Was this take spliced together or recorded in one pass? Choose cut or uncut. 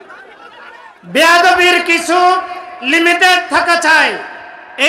uncut